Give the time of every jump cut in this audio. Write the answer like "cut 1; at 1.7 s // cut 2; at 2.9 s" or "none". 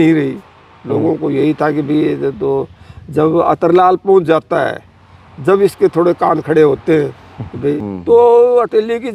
cut 1; at 7.8 s